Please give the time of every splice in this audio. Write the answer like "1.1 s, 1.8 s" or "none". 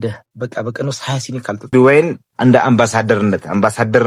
1.7 s